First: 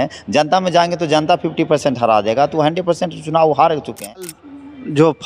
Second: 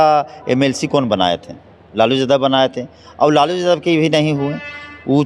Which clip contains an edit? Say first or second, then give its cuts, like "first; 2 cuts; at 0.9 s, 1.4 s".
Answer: first; 1 cut; at 4.2 s